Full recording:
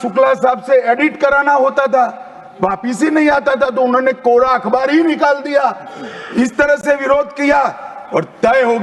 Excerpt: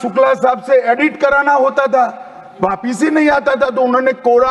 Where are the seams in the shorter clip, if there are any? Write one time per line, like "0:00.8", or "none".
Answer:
none